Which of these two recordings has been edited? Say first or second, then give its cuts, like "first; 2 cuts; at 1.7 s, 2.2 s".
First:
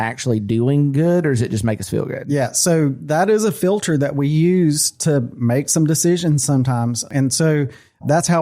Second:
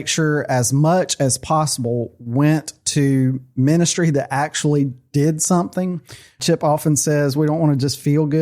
second; 1 cut; at 6.4 s